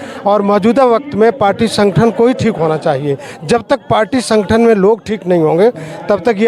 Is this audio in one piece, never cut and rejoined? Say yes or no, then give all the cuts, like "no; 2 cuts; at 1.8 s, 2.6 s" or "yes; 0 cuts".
yes; 0 cuts